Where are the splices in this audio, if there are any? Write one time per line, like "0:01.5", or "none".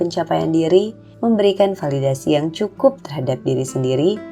0:01.0